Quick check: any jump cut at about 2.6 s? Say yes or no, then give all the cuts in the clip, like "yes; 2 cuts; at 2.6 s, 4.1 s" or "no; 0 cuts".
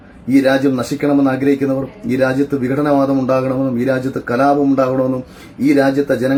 no; 0 cuts